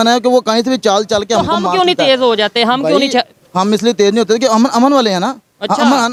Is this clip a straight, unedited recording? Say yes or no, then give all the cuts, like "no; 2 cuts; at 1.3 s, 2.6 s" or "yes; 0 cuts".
yes; 0 cuts